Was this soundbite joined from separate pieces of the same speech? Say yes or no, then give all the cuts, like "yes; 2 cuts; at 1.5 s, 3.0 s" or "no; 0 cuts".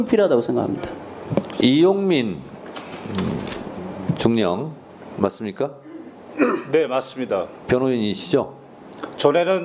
yes; 1 cut; at 1.5 s